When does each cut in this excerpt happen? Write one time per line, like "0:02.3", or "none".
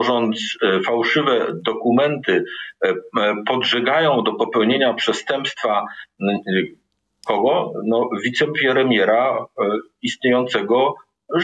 none